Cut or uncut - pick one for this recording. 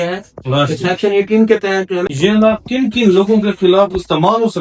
cut